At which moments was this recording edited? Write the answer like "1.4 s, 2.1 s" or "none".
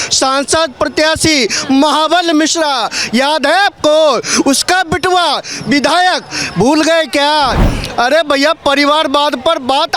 none